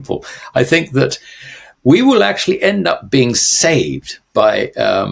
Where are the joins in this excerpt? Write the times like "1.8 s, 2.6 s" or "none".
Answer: none